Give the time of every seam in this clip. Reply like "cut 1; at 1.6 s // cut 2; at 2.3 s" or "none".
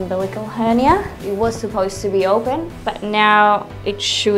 cut 1; at 2.7 s